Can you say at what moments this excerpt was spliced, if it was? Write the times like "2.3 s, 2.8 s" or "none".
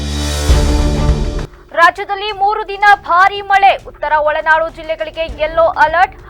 1.6 s